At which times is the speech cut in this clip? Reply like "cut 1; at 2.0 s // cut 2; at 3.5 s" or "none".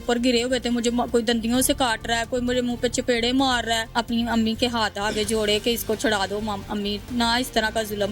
cut 1; at 3.9 s // cut 2; at 7.0 s